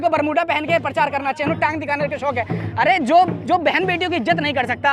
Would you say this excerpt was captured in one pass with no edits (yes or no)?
yes